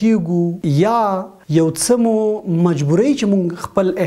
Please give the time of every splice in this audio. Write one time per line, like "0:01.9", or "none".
0:00.9